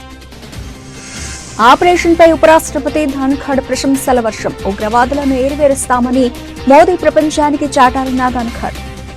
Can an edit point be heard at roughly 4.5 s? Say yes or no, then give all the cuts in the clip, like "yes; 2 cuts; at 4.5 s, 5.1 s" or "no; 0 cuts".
no; 1 cut; at 1.5 s